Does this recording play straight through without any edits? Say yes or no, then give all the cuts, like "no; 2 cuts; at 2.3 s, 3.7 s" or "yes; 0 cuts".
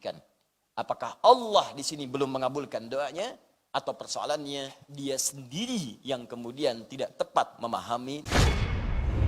no; 1 cut; at 8.3 s